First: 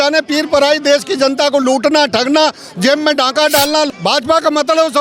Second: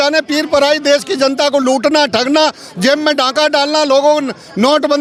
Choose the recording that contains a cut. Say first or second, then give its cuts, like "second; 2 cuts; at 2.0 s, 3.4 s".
first; 1 cut; at 3.9 s